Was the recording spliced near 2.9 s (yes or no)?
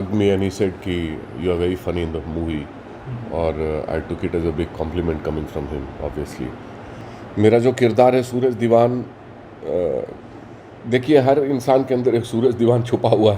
no